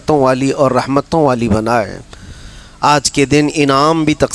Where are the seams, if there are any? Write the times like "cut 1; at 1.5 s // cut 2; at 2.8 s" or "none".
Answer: none